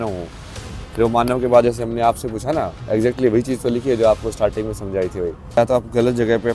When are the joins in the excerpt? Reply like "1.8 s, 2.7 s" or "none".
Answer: 5.6 s